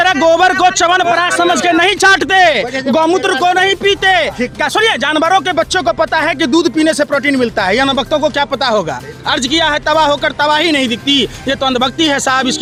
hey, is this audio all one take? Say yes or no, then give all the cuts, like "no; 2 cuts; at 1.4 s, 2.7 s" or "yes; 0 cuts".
yes; 0 cuts